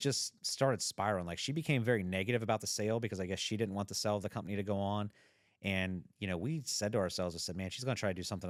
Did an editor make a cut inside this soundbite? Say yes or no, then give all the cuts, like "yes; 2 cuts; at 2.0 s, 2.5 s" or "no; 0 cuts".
no; 0 cuts